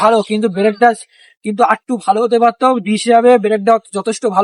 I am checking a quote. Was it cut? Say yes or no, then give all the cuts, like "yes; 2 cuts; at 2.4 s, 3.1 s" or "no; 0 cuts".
no; 0 cuts